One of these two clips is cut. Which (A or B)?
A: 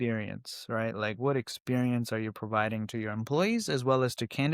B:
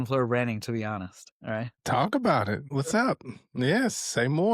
B